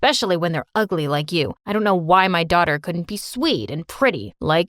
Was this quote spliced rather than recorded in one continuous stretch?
no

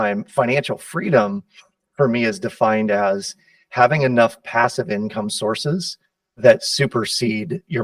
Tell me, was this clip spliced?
no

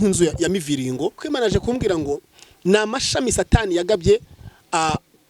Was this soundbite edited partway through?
yes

